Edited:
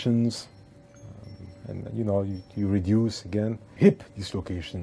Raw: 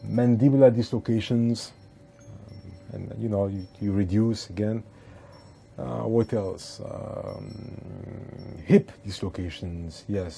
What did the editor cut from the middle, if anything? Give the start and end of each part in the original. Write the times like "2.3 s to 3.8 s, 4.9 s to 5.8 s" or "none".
4.9 s to 8.5 s